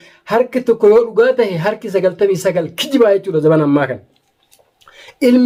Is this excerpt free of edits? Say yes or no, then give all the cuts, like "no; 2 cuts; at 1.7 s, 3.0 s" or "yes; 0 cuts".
yes; 0 cuts